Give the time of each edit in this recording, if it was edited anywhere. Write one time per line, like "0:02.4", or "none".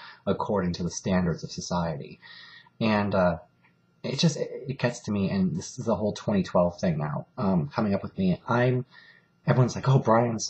none